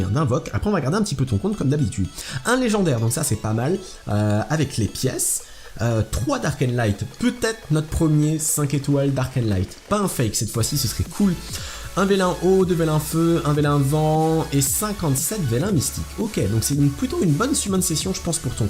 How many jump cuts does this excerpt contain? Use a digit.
0